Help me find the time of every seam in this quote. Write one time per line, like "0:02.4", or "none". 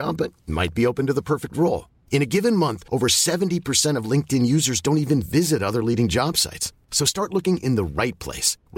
none